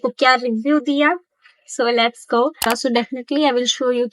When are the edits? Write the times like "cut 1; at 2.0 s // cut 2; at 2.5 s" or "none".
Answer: cut 1; at 2.6 s